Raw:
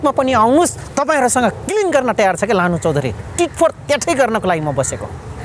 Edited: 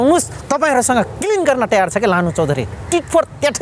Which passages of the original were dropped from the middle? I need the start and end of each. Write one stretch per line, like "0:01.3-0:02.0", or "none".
none